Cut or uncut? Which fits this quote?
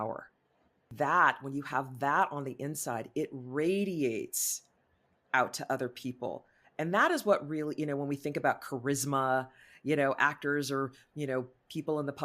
cut